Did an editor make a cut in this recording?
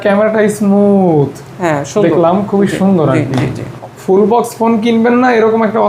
yes; 1 cut; at 3.7 s

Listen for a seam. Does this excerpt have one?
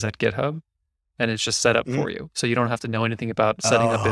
no; 0 cuts

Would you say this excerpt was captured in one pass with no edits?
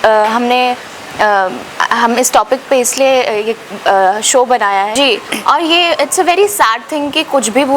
no; 1 cut; at 4.9 s

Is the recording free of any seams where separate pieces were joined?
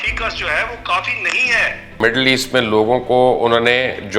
no; 1 cut; at 2.0 s

